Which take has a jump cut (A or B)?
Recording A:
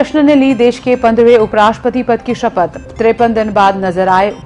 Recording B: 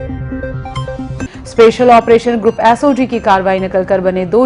B